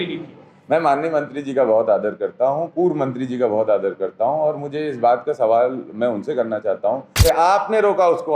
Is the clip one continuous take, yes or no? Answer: no